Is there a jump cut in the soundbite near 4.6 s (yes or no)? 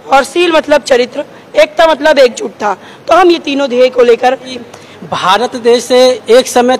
yes